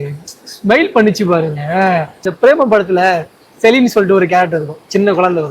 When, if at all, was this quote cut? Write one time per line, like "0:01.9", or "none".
0:02.3